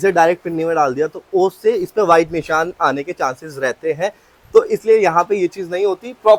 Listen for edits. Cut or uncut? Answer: uncut